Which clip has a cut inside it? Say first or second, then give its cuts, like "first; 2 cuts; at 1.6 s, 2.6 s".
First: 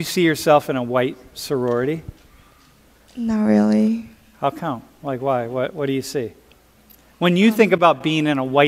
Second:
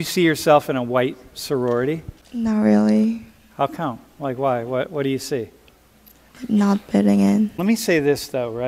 second; 3 cuts; at 2.2 s, 6.2 s, 7.6 s